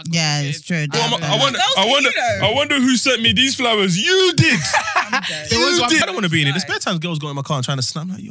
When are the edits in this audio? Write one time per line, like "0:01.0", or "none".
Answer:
0:06.0